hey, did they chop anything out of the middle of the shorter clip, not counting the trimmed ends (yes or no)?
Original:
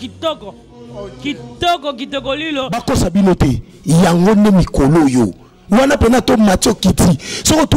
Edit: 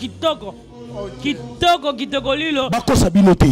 no